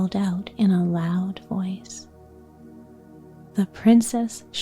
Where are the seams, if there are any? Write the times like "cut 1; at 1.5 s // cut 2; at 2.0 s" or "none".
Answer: none